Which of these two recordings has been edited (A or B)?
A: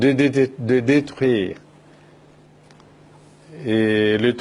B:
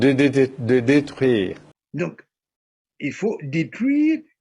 B